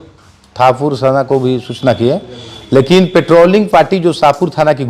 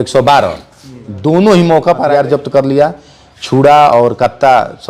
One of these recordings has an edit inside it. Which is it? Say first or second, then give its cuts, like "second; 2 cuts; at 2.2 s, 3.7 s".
second; 1 cut; at 2.1 s